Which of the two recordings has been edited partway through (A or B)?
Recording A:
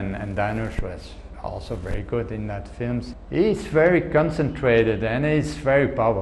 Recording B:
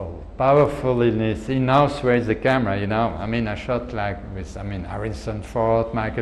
A